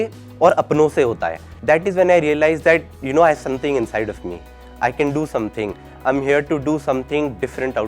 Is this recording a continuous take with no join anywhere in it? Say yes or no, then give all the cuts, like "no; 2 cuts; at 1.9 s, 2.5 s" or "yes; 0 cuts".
no; 1 cut; at 1.5 s